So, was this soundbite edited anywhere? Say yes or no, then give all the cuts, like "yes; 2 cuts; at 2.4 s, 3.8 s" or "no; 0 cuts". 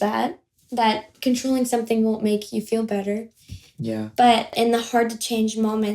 yes; 1 cut; at 4.5 s